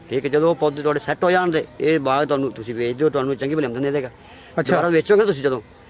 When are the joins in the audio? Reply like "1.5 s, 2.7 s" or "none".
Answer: none